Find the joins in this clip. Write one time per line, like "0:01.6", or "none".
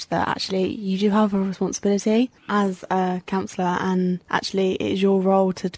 none